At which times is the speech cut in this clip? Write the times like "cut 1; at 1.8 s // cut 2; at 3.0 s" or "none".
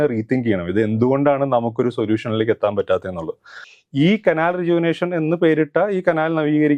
cut 1; at 3.5 s